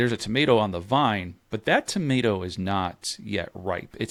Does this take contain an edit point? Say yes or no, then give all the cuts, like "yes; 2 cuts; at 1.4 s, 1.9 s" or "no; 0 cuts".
no; 0 cuts